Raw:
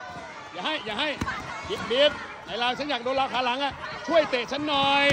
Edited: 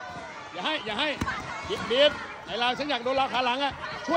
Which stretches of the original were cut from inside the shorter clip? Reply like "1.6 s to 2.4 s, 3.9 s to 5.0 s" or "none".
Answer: none

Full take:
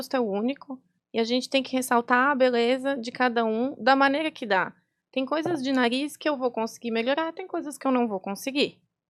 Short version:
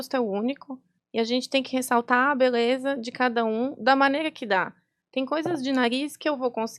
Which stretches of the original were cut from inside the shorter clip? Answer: none

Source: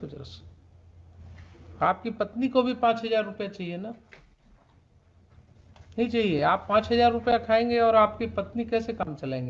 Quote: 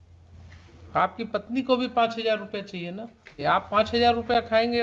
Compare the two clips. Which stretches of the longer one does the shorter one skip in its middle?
4.3 s to 6.4 s

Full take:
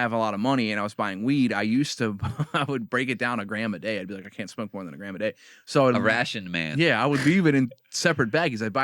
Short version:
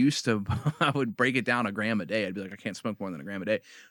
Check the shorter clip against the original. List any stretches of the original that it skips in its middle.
none

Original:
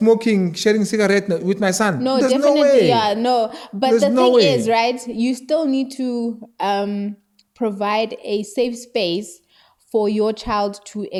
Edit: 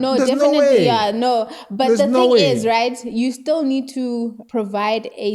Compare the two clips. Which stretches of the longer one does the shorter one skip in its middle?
6.4 s to 7.5 s

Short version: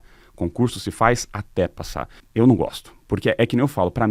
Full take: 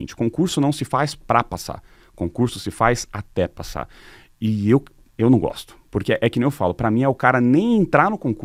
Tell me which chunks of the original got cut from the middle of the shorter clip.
4.0 s to 5.0 s

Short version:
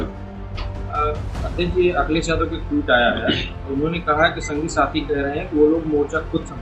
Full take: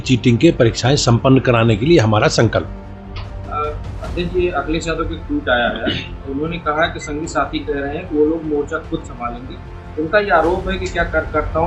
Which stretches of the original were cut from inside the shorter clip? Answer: none

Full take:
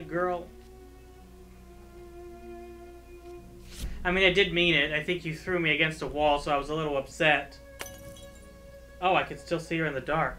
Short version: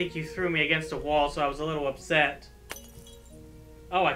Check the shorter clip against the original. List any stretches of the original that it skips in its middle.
none

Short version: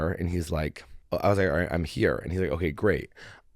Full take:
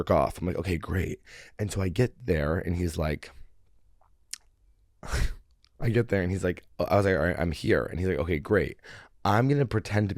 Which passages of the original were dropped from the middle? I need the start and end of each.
3.4 s to 6.6 s

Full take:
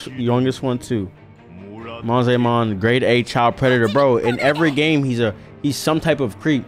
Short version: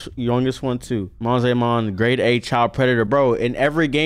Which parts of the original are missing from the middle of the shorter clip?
1.1 s to 2.0 s

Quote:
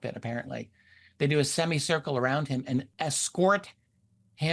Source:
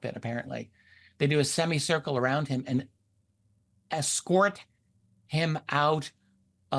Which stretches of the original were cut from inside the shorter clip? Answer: 2.9 s to 3.8 s

